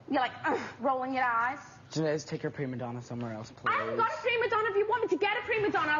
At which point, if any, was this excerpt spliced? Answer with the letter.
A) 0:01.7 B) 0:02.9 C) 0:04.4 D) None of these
A